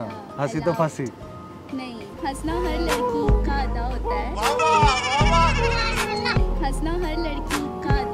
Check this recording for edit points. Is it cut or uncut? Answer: uncut